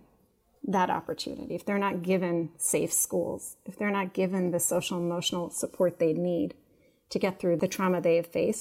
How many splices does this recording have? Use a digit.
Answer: 1